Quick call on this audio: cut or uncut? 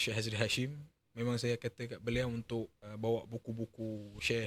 cut